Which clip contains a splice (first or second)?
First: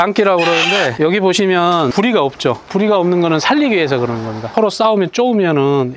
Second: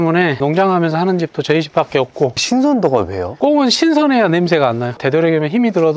second